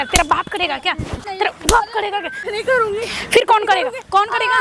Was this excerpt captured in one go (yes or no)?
no